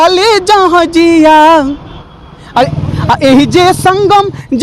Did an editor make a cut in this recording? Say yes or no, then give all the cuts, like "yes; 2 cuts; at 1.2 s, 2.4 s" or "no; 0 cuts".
yes; 1 cut; at 2.7 s